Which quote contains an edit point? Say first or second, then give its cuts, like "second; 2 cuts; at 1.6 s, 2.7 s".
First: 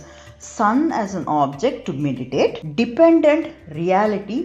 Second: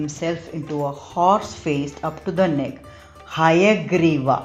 first; 1 cut; at 2.6 s